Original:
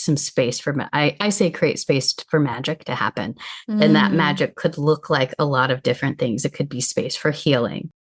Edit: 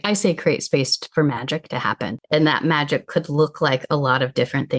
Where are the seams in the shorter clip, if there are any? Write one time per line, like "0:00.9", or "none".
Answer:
0:02.3